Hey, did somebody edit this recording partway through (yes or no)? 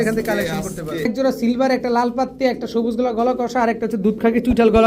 yes